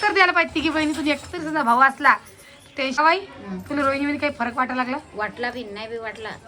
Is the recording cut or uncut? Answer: cut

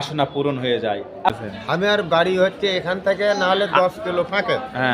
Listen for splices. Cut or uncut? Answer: cut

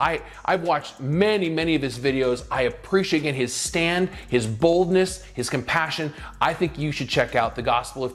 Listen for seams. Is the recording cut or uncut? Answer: uncut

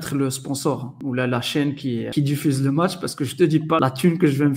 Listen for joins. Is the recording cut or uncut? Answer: cut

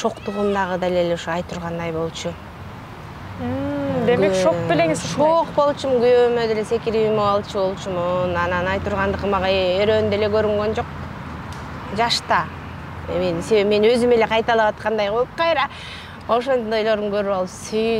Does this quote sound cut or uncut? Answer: uncut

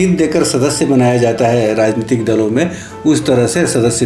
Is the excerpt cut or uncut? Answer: uncut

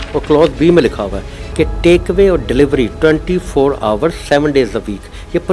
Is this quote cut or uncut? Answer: uncut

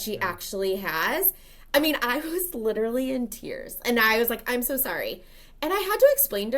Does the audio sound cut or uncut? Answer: uncut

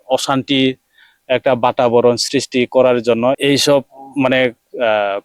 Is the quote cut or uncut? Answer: cut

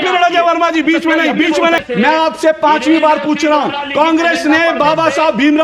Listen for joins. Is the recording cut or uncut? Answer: cut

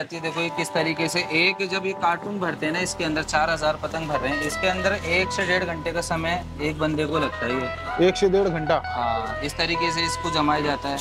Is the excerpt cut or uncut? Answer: uncut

